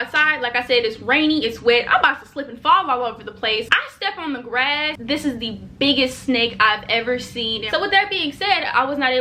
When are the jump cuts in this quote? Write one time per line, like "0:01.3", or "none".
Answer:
0:03.7
0:05.0
0:07.7